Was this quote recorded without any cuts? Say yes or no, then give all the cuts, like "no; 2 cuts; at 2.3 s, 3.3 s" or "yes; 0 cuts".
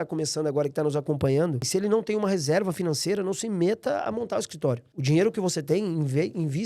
no; 2 cuts; at 1.6 s, 4.9 s